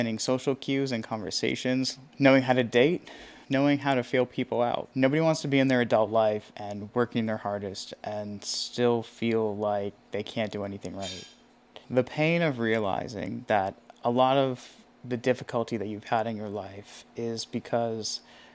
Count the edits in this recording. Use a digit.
4